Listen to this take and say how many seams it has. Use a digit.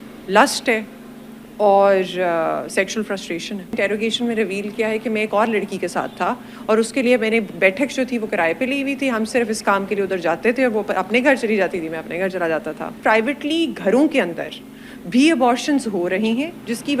2